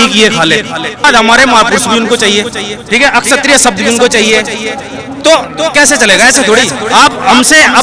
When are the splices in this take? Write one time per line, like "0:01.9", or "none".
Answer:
0:01.0